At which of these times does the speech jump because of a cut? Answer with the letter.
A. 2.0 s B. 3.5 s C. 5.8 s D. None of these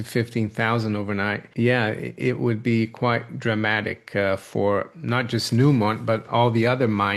D